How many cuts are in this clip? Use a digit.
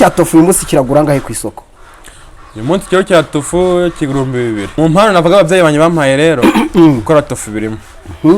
1